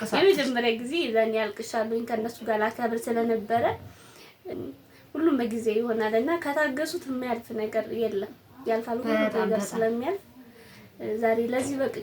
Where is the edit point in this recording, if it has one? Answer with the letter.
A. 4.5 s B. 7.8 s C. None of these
A